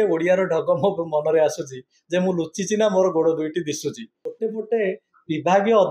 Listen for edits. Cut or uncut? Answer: cut